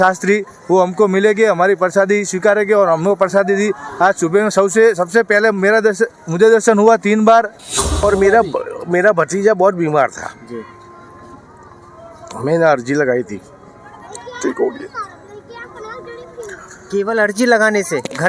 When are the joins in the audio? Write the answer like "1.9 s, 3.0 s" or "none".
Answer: 7.9 s